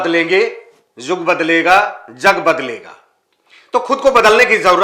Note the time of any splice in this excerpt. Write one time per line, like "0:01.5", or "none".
none